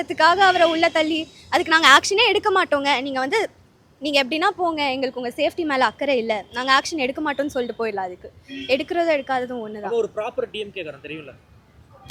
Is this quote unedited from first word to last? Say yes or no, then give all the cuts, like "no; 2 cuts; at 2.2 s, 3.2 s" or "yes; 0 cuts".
yes; 0 cuts